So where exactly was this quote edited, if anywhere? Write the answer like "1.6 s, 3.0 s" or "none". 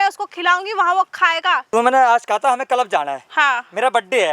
1.6 s